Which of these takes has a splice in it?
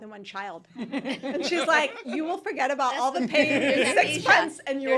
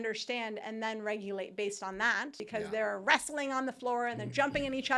second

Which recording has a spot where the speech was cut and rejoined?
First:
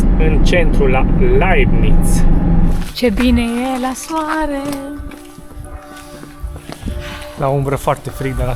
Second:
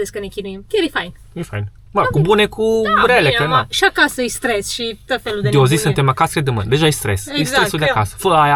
first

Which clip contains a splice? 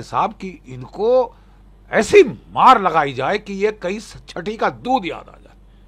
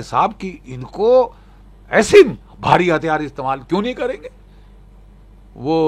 second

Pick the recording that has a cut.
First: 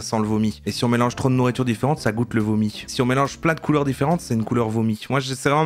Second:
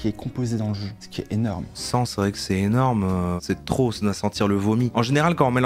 second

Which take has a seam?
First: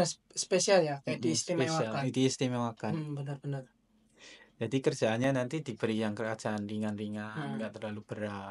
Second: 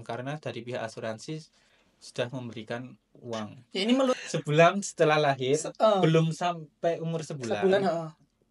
second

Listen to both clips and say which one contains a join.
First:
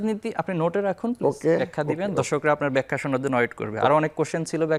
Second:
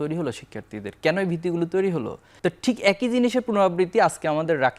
second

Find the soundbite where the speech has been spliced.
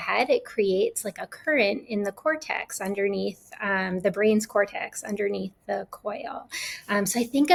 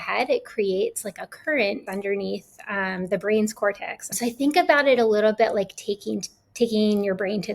second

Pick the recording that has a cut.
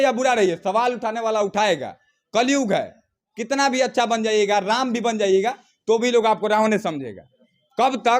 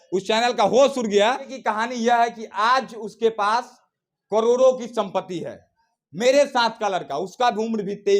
second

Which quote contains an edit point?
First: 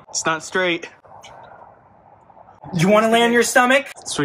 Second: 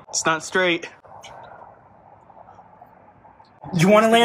first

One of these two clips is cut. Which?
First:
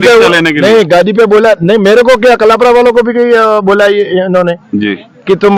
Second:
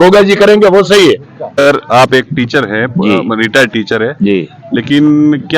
second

